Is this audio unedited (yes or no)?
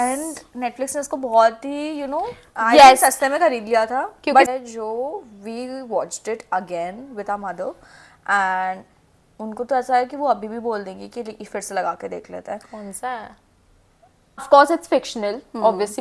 no